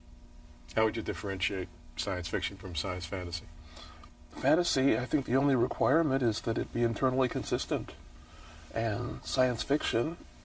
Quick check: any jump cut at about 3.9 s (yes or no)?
no